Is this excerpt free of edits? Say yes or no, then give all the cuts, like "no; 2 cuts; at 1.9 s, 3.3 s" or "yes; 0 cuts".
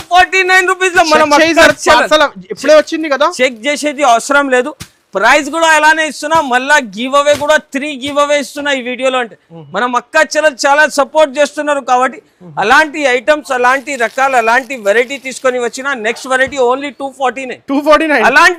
yes; 0 cuts